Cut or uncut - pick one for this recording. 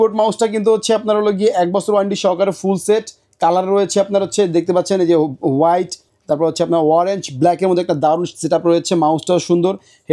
uncut